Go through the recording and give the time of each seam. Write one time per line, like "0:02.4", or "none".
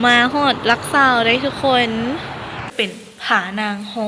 0:02.7